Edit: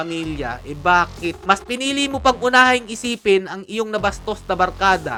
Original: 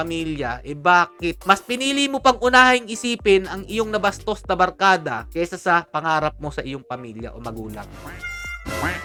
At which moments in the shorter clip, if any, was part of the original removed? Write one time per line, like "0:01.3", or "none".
none

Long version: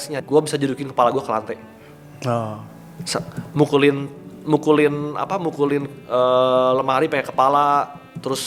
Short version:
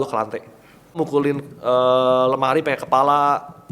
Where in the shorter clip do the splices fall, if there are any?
0:00.9

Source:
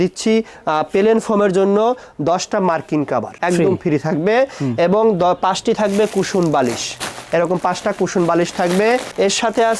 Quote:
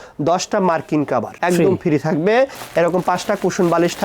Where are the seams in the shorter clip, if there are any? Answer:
0:02.6

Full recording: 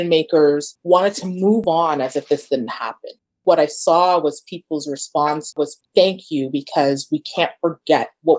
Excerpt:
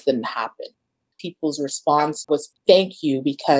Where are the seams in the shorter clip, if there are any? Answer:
0:01.0

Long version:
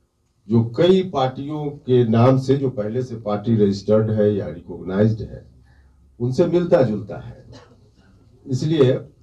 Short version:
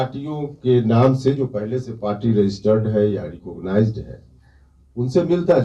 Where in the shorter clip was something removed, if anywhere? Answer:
none

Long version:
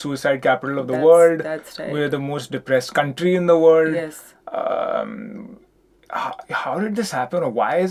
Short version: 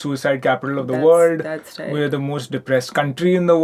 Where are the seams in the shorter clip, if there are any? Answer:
none

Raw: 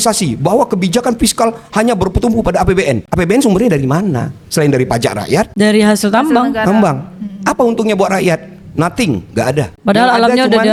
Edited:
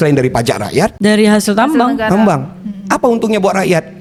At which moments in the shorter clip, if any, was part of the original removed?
none

